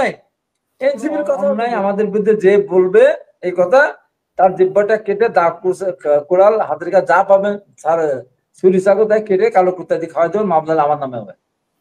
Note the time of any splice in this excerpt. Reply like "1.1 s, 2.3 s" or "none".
1.6 s